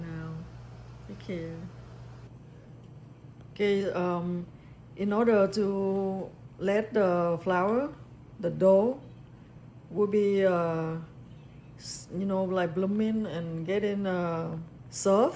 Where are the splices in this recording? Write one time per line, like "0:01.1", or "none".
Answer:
0:02.3